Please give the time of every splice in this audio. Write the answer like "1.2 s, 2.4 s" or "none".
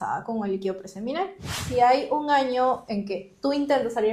1.6 s